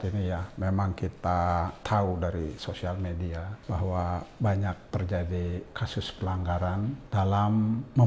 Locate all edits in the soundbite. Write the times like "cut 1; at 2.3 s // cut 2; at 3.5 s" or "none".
cut 1; at 1.8 s // cut 2; at 3.5 s // cut 3; at 4.8 s // cut 4; at 7.0 s